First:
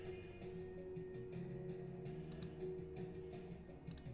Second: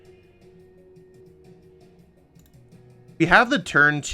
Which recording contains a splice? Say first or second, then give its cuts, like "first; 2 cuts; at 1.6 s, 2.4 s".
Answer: second; 2 cuts; at 1.2 s, 3.1 s